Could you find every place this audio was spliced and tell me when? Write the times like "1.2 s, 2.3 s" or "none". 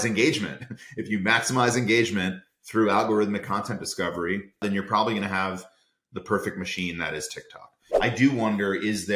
4.6 s, 7.8 s